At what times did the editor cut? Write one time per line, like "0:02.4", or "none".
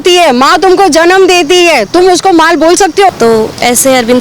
0:03.1